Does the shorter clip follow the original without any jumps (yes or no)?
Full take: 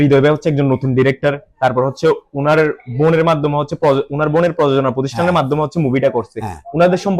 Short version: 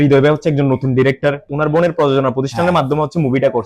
no